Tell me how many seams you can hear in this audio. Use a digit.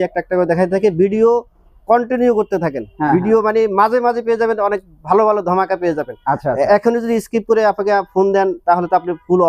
0